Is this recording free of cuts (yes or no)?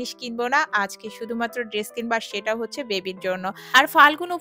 no